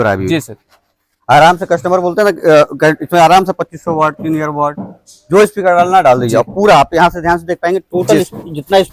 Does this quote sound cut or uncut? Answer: uncut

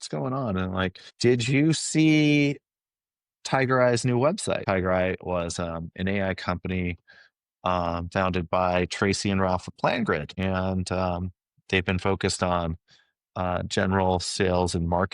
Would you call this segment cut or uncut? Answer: cut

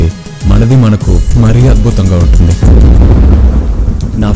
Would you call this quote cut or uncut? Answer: uncut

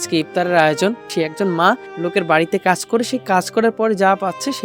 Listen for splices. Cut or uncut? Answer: cut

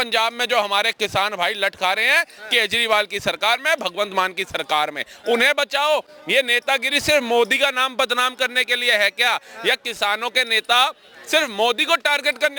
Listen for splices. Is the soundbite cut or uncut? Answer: uncut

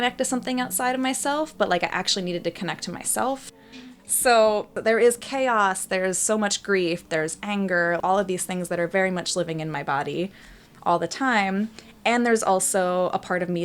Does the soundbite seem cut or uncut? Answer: cut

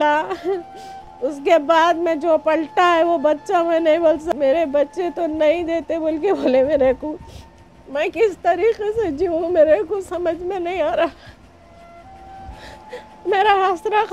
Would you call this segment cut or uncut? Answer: cut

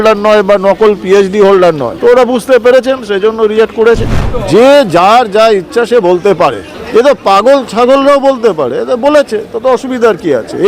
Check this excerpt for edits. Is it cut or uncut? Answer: cut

